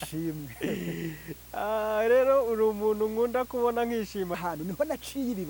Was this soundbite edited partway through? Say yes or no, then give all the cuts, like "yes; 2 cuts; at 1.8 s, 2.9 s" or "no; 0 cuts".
yes; 1 cut; at 4.4 s